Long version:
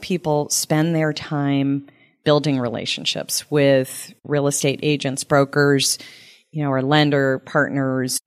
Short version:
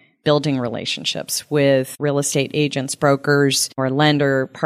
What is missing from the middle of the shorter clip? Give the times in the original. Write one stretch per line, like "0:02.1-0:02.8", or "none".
0:03.9-0:04.2
0:06.0-0:06.6